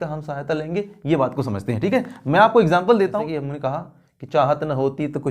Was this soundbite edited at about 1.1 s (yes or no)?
no